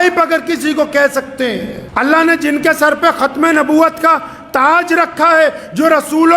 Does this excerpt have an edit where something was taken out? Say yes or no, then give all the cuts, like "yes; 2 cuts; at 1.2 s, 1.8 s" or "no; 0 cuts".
yes; 1 cut; at 1.8 s